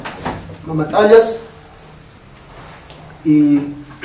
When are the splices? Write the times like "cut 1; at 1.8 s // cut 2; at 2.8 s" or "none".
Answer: none